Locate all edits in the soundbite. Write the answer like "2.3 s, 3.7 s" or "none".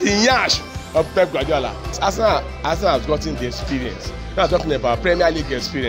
2.0 s